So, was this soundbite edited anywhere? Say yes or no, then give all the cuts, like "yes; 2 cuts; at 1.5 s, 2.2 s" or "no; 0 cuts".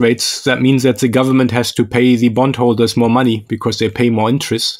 no; 0 cuts